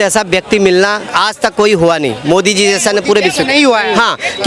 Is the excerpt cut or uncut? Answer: cut